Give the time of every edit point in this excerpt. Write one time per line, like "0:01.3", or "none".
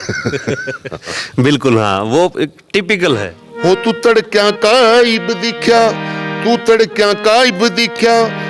0:03.4

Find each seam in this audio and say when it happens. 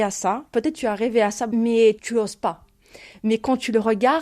0:01.5

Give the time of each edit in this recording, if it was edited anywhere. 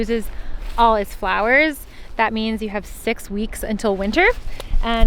none

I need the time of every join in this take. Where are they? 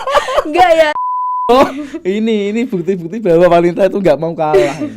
0:00.9

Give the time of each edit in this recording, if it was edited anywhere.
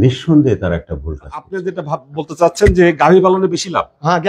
0:01.5

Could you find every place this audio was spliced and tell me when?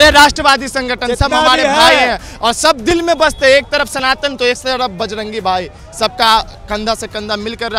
none

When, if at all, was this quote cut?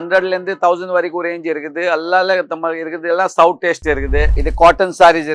0:04.4

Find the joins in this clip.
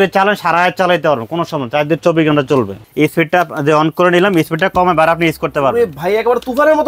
0:02.8

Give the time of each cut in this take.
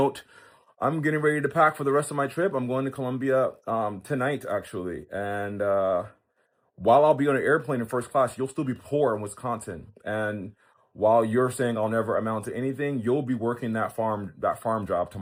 none

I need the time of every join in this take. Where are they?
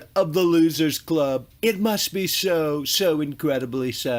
none

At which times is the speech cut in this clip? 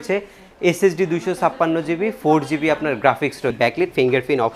0:03.5

